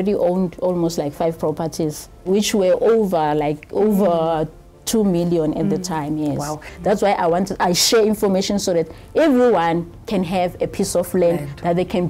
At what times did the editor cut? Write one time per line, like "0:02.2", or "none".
0:02.3
0:06.7

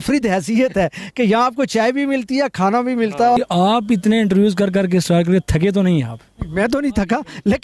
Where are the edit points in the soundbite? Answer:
0:03.4

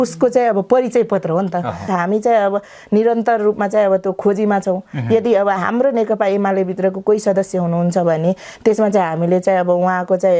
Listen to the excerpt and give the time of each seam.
0:01.9

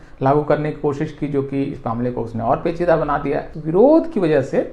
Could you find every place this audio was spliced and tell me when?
0:03.5

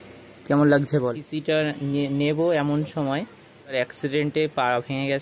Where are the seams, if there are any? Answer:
0:01.3
0:03.7

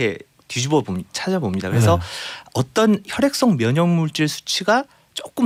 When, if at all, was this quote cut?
none

